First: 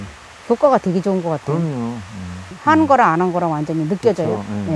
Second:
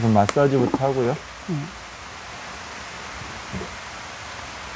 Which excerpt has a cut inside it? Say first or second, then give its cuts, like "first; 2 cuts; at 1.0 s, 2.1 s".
first; 1 cut; at 2.5 s